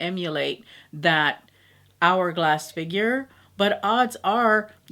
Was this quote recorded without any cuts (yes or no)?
yes